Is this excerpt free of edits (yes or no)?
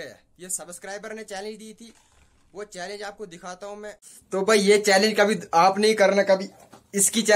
no